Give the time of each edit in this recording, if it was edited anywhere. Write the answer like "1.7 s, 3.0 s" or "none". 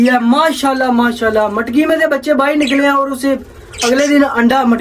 none